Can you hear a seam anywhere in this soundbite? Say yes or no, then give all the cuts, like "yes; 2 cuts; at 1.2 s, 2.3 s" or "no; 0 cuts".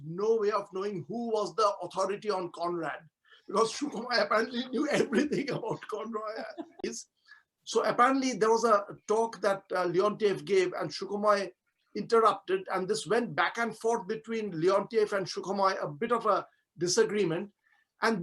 yes; 1 cut; at 6.8 s